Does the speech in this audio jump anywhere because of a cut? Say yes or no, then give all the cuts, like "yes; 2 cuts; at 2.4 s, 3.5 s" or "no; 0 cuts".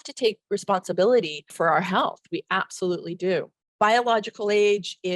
yes; 2 cuts; at 1.4 s, 3.6 s